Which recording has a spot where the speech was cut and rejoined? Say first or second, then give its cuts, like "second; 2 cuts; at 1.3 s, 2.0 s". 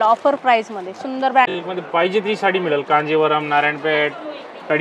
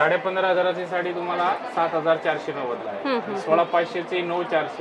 first; 1 cut; at 1.5 s